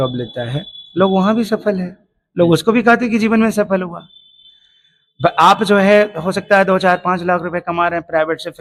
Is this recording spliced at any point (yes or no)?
no